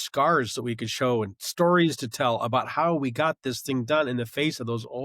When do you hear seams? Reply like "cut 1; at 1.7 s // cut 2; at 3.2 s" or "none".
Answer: none